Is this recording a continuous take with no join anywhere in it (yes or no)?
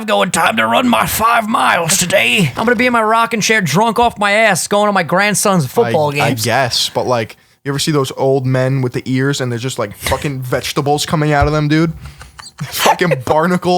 no